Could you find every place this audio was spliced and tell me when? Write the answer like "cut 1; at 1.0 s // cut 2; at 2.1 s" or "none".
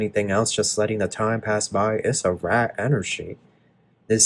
none